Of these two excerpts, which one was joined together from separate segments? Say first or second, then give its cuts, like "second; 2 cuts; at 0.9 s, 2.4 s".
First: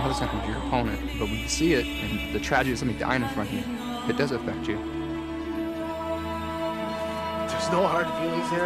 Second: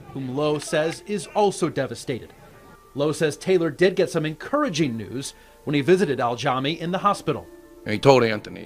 second; 1 cut; at 2.0 s